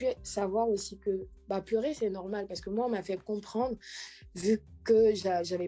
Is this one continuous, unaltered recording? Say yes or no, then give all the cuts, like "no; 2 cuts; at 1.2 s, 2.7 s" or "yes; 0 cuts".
yes; 0 cuts